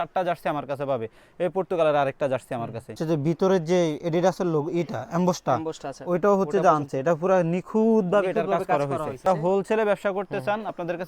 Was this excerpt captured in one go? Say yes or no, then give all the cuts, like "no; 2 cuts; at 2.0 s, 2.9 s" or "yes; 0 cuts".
no; 2 cuts; at 3.0 s, 9.3 s